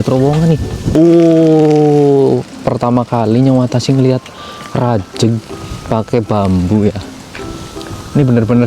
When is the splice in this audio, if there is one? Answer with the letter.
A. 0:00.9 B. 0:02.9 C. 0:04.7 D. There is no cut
A